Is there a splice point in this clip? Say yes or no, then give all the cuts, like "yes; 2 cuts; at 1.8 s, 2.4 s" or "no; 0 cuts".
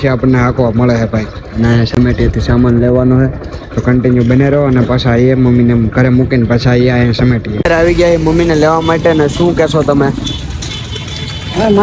no; 0 cuts